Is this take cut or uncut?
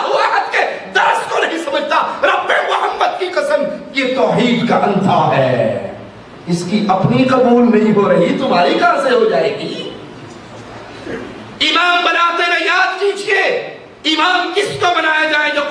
uncut